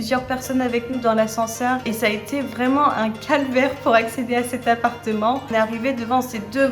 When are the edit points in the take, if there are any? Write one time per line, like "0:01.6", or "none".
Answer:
0:01.8
0:05.5